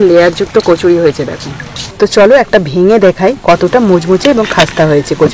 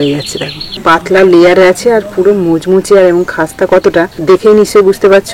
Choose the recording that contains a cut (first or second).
first